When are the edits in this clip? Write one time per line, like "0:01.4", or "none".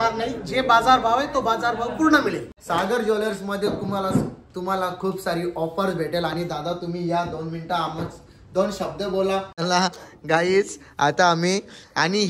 0:02.5
0:09.6